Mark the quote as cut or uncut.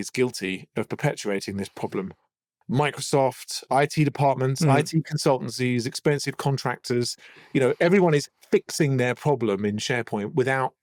uncut